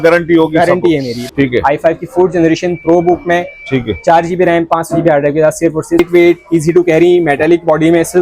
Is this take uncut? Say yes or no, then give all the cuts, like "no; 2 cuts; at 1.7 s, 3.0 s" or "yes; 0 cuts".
no; 2 cuts; at 1.2 s, 6.0 s